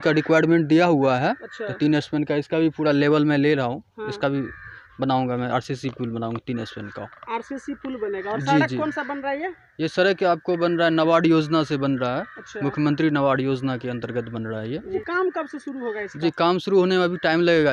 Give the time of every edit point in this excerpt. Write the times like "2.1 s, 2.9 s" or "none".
none